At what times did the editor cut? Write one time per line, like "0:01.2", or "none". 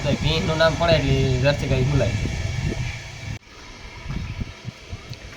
0:03.4